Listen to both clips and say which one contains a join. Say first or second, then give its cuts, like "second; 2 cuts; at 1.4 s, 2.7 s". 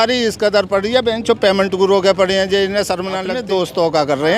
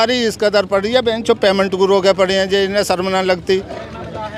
first; 1 cut; at 3.3 s